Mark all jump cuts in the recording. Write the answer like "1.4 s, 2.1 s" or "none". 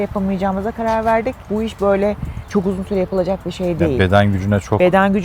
1.4 s

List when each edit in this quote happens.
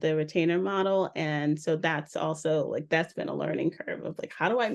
none

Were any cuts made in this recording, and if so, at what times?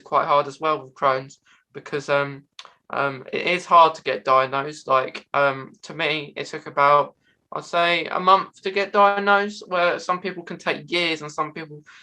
none

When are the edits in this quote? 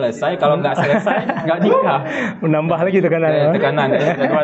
none

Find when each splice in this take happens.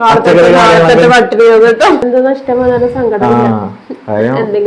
2.0 s

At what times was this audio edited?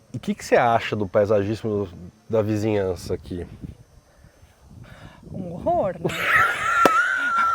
none

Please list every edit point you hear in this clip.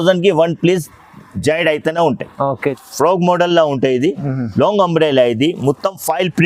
2.8 s

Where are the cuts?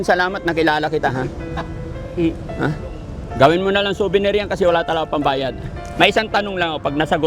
5.8 s

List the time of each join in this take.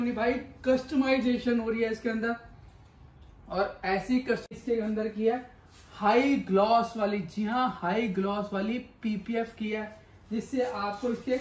4.5 s

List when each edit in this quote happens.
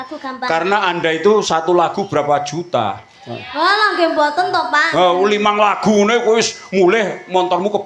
none

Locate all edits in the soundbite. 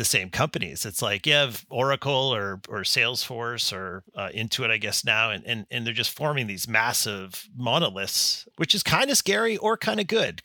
4.1 s

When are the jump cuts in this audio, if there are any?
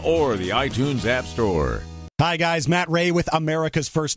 2.0 s

